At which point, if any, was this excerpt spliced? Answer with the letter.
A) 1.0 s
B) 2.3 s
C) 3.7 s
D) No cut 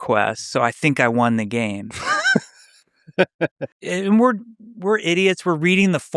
C